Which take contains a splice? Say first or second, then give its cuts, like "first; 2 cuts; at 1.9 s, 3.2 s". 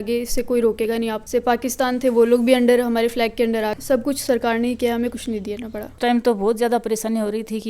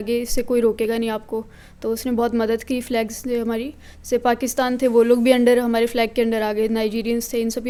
first; 3 cuts; at 1.2 s, 3.7 s, 5.9 s